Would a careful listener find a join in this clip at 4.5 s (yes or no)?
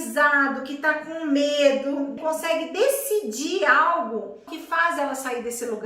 yes